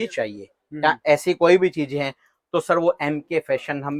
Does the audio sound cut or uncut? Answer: uncut